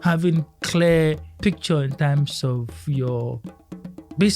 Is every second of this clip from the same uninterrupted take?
no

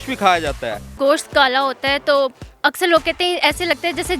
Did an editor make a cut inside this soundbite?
yes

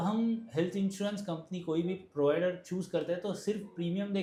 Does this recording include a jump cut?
no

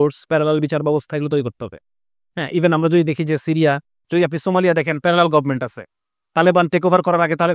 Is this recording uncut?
no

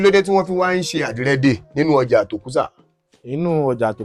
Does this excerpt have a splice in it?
no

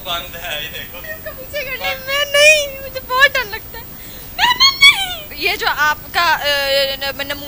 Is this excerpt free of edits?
no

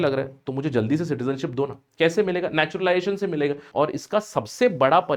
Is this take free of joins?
no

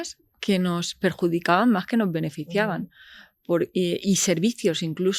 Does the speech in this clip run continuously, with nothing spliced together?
yes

